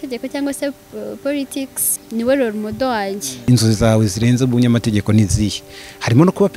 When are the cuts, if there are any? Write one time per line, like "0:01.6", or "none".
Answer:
0:02.0
0:03.5